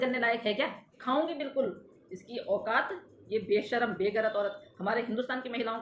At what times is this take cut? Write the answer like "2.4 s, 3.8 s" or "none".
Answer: 0.9 s